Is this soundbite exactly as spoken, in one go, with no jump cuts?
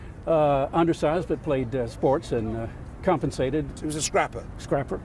no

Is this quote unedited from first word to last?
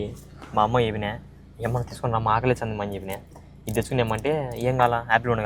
yes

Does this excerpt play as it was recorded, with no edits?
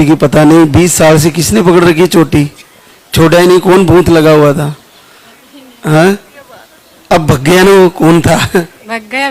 yes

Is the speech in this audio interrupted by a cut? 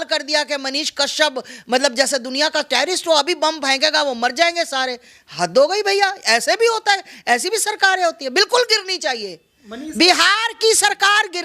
no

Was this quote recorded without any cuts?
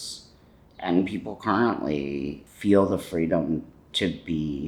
no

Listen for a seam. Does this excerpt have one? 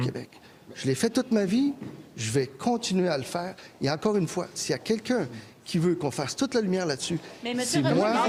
no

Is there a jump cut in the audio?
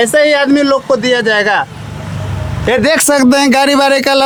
no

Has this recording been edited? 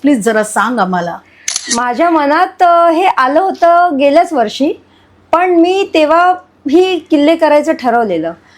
yes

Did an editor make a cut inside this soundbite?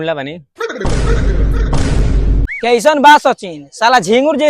yes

